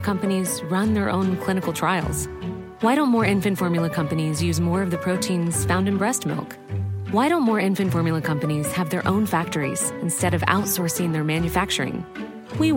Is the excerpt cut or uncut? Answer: uncut